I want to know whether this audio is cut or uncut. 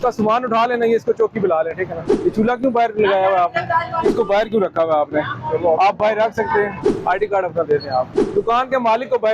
cut